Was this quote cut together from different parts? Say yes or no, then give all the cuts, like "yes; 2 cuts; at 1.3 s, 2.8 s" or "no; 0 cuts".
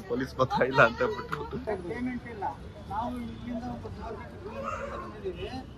yes; 1 cut; at 1.6 s